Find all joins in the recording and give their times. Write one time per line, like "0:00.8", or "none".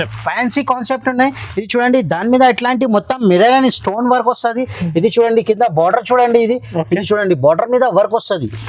none